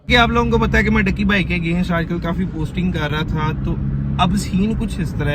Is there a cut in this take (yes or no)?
no